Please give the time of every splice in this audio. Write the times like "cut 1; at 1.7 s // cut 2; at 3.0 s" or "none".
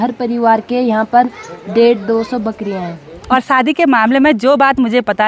cut 1; at 3.1 s